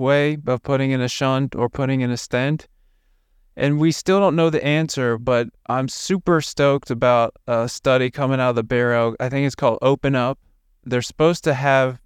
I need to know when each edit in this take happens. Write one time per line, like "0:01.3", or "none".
none